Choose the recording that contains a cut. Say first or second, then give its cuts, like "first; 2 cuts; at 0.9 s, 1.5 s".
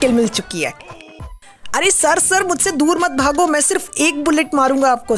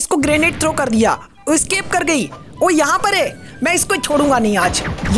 first; 1 cut; at 1.2 s